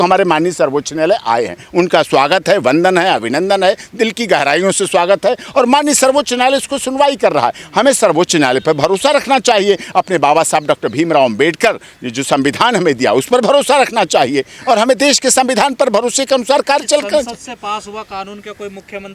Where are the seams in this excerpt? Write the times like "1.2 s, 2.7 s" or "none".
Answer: none